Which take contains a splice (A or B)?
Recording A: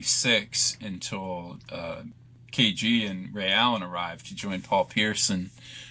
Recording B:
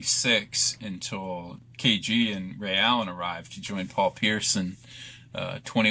B